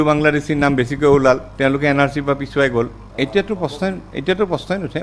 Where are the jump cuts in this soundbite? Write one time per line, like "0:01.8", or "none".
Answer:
0:03.0